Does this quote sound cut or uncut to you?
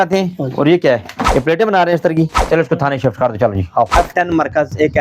cut